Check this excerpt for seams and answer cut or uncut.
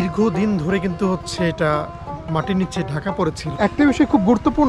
cut